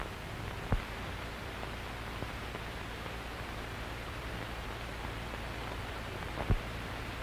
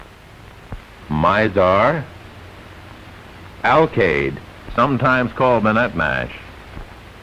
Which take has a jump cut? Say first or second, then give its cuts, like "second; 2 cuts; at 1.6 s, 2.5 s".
first; 1 cut; at 1.0 s